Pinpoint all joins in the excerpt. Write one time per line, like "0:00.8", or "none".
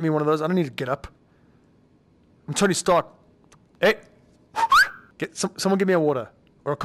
0:03.7
0:05.0